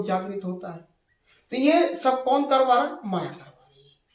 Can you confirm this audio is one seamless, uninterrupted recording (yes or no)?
yes